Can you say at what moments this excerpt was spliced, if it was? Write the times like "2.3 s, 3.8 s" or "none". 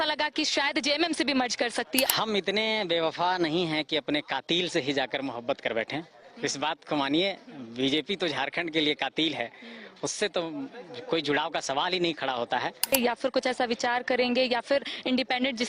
2.1 s, 12.9 s